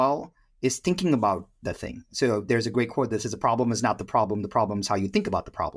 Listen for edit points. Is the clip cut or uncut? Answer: uncut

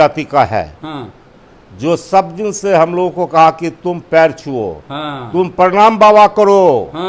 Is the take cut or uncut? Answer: uncut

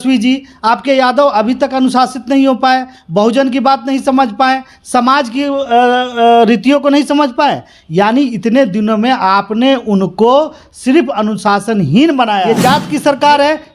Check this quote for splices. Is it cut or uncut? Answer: cut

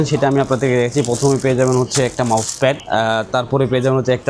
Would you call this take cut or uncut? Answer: uncut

